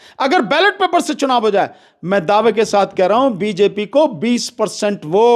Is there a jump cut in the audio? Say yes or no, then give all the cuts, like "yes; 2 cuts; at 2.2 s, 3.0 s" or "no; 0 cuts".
no; 0 cuts